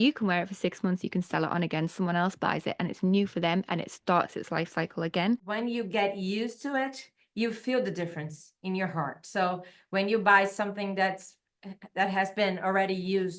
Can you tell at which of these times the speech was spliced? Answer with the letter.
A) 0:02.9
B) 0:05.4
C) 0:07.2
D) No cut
B